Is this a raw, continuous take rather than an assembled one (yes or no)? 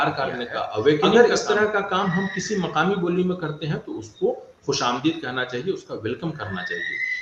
no